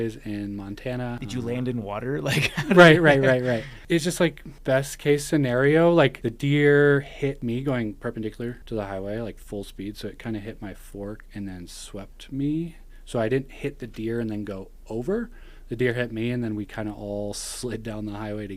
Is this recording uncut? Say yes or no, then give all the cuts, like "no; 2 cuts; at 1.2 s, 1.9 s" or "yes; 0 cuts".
no; 6 cuts; at 1.2 s, 3.8 s, 4.5 s, 6.2 s, 7.4 s, 8.6 s